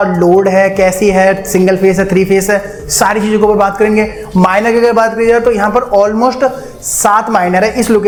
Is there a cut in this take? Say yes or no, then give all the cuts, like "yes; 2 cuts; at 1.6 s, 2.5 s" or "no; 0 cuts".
no; 0 cuts